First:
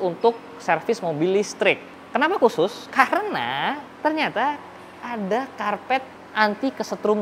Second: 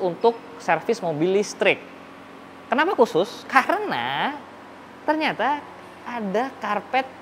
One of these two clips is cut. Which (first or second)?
first